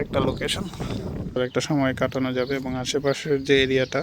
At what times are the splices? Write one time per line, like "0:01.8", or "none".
0:01.4